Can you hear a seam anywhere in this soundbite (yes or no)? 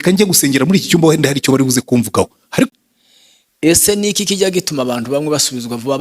yes